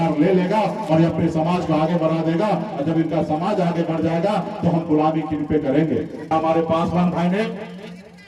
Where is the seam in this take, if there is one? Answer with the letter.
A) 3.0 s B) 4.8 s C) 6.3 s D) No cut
C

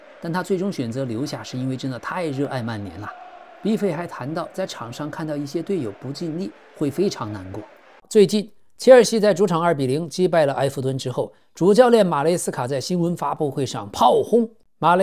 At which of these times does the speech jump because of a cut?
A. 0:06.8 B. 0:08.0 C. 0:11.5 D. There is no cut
B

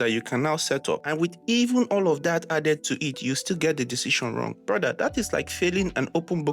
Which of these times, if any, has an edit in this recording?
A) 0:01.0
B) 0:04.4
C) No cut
A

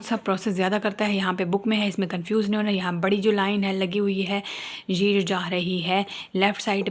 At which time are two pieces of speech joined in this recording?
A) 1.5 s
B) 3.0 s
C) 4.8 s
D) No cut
D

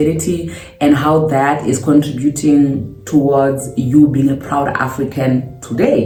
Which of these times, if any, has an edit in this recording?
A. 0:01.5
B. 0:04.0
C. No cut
C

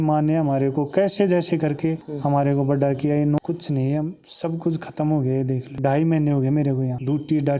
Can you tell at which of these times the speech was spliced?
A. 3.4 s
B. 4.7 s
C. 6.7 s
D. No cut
A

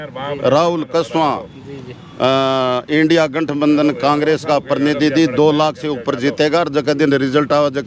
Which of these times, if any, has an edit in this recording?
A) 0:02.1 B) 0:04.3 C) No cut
C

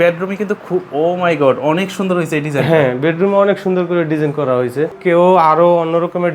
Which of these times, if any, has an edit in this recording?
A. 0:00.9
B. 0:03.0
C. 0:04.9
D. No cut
C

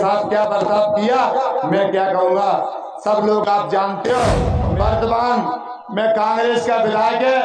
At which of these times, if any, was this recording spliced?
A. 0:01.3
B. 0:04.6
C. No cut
B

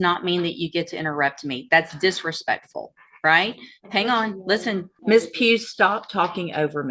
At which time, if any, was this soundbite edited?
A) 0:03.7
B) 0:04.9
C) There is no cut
B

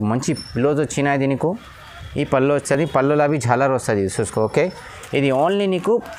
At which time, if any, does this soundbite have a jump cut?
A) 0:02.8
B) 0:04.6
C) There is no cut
C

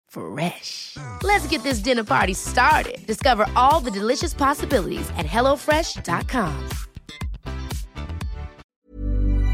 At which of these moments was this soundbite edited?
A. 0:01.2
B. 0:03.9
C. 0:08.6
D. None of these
C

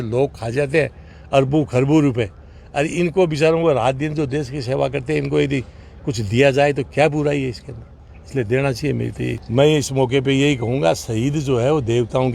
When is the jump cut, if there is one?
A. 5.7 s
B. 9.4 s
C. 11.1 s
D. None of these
B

